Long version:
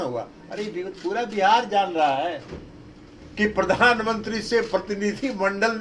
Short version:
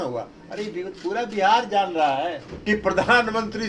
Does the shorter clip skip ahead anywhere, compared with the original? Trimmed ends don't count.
yes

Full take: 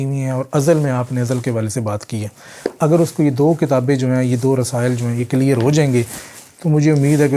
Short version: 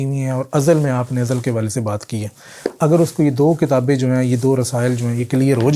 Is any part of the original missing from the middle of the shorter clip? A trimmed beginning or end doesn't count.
no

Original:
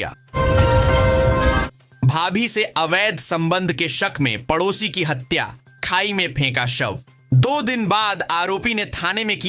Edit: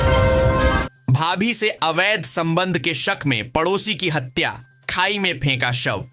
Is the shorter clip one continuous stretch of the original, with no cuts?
no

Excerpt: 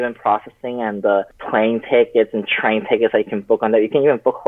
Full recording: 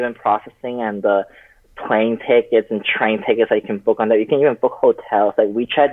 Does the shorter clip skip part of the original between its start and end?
yes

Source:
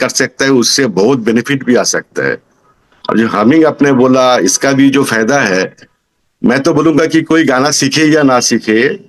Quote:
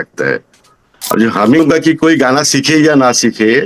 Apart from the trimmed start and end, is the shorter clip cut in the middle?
yes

